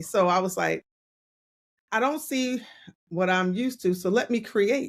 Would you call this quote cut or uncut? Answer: uncut